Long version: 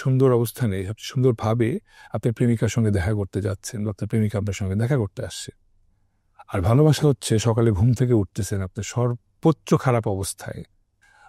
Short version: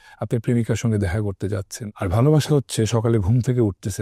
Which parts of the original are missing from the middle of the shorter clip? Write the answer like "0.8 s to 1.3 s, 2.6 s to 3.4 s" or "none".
3.7 s to 6.3 s